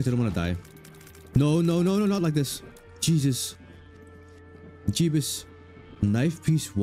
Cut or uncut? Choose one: uncut